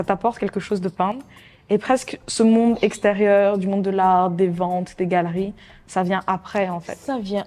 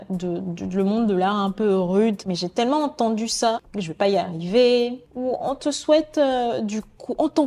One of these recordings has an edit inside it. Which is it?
second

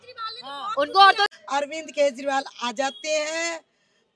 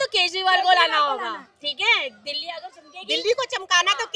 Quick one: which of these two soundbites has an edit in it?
first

